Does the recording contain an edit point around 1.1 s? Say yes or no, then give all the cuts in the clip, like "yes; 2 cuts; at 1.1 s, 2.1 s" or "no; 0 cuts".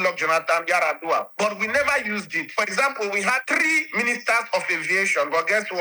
no; 2 cuts; at 2.4 s, 3.4 s